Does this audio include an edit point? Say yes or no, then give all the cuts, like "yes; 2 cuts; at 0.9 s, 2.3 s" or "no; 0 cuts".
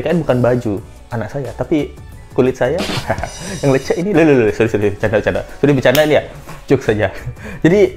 no; 0 cuts